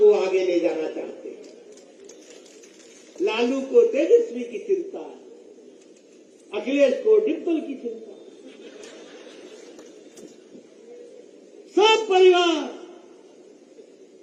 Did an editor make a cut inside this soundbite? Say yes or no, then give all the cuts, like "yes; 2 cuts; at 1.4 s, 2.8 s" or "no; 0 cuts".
no; 0 cuts